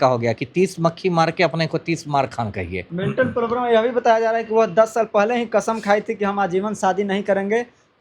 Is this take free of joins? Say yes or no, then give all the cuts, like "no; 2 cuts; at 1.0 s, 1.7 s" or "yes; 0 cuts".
no; 1 cut; at 2.8 s